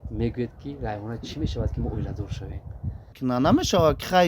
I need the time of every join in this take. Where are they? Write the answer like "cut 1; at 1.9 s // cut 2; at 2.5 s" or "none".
cut 1; at 3.1 s